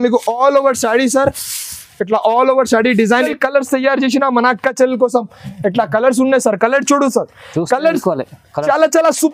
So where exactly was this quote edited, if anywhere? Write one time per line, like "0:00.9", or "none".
0:03.2

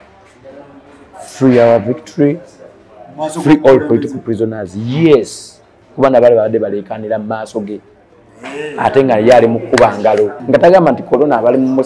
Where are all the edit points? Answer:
0:10.4

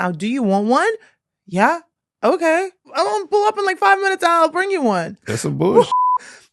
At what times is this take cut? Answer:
0:02.9
0:05.2

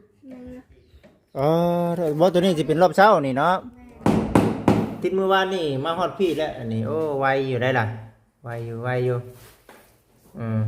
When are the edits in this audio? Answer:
0:04.0

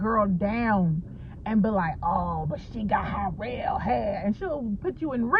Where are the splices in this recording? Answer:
none

